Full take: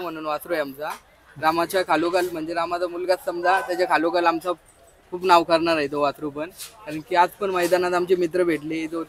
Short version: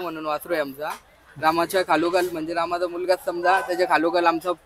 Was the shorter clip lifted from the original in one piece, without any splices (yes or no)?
yes